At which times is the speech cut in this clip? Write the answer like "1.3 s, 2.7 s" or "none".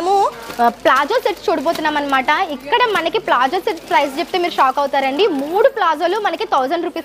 none